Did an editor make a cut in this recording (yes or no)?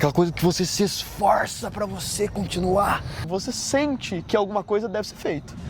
yes